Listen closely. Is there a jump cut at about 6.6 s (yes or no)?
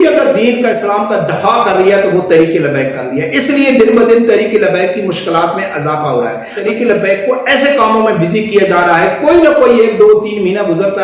yes